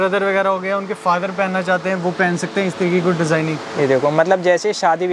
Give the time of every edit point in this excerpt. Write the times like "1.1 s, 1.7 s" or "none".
none